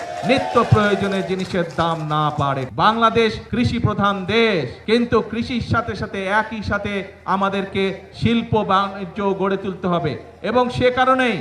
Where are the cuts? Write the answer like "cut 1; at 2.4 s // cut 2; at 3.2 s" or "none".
cut 1; at 2.7 s // cut 2; at 3.4 s // cut 3; at 4.7 s